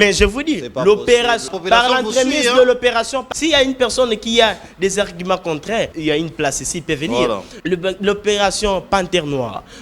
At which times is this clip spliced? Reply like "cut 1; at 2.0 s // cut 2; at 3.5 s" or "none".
cut 1; at 1.5 s // cut 2; at 3.3 s // cut 3; at 5.9 s // cut 4; at 7.5 s